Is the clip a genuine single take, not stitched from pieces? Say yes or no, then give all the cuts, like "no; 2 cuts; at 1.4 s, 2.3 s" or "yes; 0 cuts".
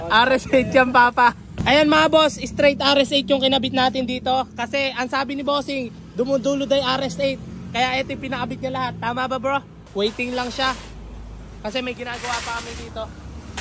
no; 2 cuts; at 1.5 s, 9.8 s